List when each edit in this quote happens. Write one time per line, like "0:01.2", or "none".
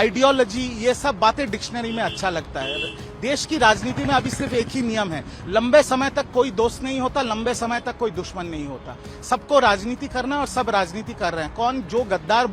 none